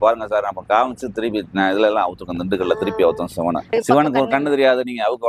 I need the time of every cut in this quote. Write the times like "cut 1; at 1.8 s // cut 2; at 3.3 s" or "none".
cut 1; at 3.7 s